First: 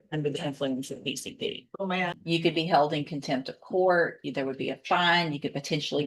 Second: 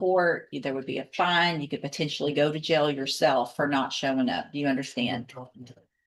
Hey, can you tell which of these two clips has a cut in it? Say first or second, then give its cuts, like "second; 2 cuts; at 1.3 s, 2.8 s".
first; 1 cut; at 2.2 s